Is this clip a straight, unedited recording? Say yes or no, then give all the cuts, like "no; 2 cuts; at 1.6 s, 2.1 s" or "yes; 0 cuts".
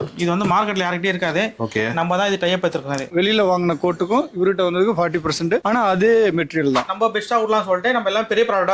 no; 2 cuts; at 3.1 s, 6.9 s